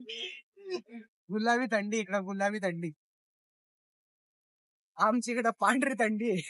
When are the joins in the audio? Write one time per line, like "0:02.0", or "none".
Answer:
none